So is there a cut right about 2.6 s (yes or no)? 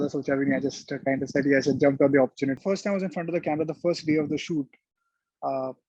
yes